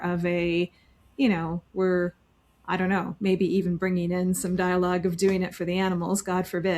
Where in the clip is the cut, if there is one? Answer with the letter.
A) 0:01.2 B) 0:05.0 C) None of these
C